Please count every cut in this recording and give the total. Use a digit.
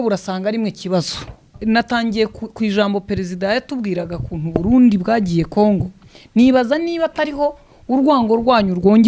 1